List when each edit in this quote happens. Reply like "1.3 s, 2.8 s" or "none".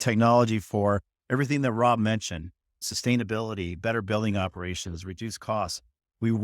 none